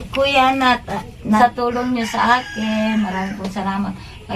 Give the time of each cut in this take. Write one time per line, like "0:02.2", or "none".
0:01.4